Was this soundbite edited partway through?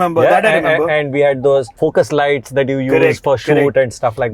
yes; 1 cut; at 1.8 s

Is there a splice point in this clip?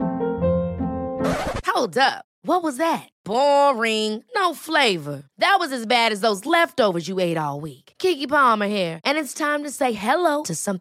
no; 0 cuts

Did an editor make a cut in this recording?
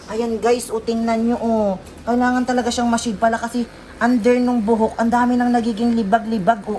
no; 0 cuts

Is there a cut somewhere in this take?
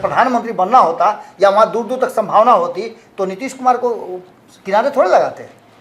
no; 0 cuts

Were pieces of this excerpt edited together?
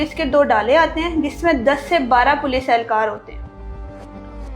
no; 0 cuts

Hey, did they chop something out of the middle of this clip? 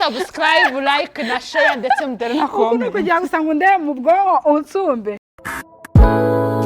yes; 1 cut; at 5.3 s

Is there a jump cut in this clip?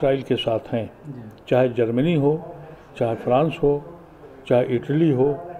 no; 0 cuts

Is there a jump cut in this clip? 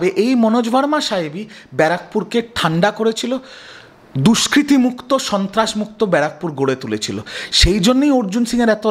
no; 0 cuts

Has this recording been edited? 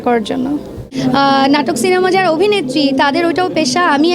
yes; 1 cut; at 0.9 s

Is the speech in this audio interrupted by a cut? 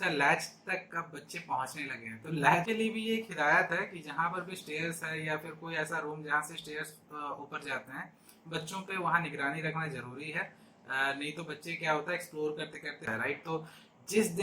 yes; 2 cuts; at 2.6 s, 13.0 s

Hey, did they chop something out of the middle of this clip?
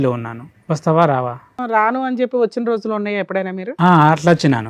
yes; 1 cut; at 1.6 s

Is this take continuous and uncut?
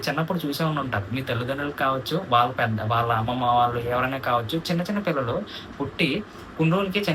yes; 0 cuts

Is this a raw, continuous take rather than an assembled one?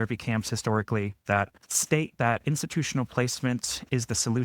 no; 1 cut; at 1.2 s

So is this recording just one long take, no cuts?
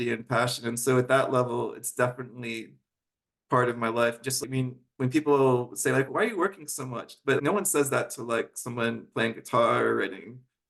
no; 3 cuts; at 4.4 s, 6.1 s, 7.4 s

